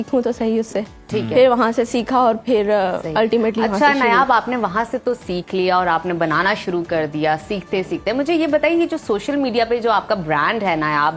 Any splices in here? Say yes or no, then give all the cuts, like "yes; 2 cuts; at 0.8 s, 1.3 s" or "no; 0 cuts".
no; 0 cuts